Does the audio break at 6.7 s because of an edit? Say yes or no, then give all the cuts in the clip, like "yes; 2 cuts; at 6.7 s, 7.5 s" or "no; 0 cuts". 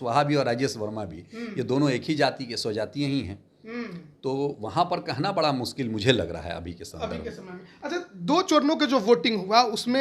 no; 0 cuts